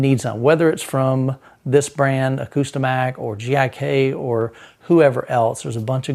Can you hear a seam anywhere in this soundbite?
no; 0 cuts

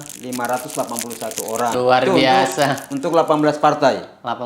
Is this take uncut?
no; 1 cut; at 1.7 s

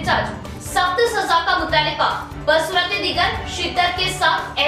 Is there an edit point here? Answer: no; 0 cuts

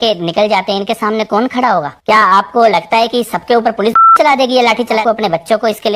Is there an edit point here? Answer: yes; 1 cut; at 5.0 s

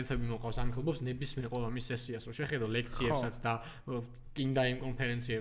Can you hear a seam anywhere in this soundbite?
no; 0 cuts

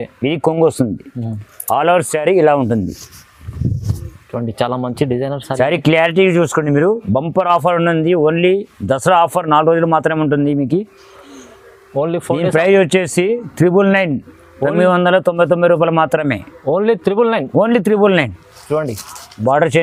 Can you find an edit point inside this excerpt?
no; 0 cuts

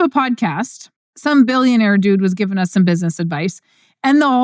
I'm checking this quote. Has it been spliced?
yes; 1 cut; at 1.1 s

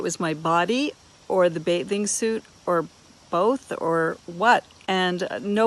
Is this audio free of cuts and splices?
yes; 0 cuts

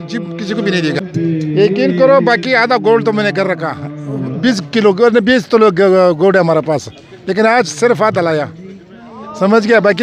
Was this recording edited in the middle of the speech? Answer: yes; 1 cut; at 1.0 s

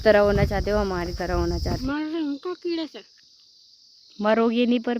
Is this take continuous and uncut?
no; 1 cut; at 1.8 s

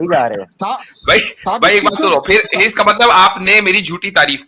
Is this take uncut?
yes; 0 cuts

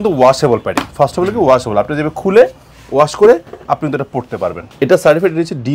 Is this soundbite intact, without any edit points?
no; 1 cut; at 4.7 s

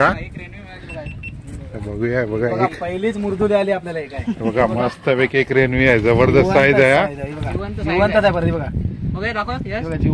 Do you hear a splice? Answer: no; 0 cuts

